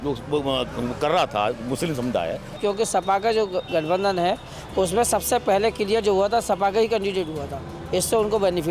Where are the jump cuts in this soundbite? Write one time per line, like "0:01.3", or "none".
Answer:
0:02.5